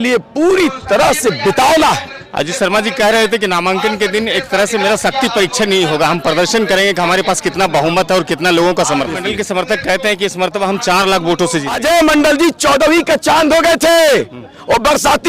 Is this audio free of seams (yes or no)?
no